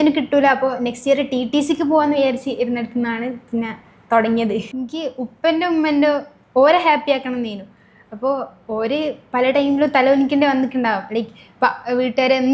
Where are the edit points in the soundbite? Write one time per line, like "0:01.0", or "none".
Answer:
0:04.8